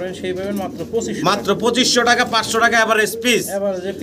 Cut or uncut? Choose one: uncut